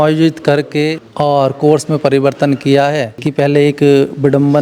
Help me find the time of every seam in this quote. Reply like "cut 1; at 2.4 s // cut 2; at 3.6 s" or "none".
cut 1; at 1.0 s // cut 2; at 3.2 s